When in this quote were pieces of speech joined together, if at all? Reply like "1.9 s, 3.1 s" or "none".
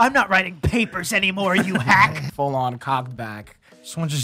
2.2 s